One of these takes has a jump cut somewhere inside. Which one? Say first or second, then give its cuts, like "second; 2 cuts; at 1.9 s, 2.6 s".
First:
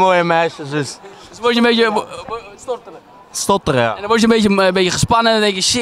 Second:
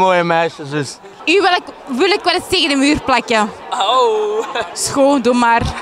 second; 2 cuts; at 1.1 s, 4.6 s